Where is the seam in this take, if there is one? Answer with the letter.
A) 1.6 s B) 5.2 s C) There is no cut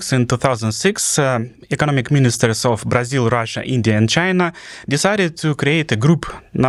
C